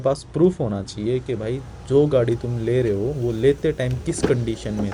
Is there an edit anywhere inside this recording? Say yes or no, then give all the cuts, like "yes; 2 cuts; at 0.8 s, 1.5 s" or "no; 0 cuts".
no; 0 cuts